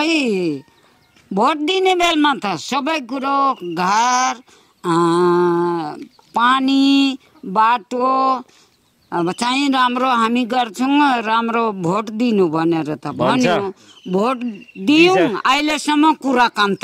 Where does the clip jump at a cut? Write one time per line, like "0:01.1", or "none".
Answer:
none